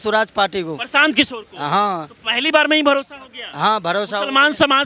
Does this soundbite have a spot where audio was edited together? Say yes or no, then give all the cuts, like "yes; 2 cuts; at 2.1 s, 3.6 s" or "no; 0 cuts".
no; 0 cuts